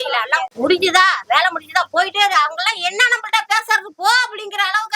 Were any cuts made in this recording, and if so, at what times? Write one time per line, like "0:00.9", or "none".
none